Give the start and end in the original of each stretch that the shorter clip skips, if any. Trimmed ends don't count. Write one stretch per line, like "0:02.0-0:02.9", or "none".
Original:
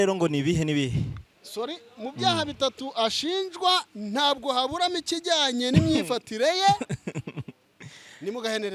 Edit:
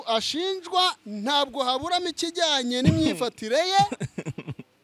none